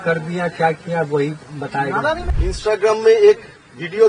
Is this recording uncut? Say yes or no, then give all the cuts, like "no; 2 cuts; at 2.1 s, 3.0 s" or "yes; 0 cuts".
no; 1 cut; at 2.3 s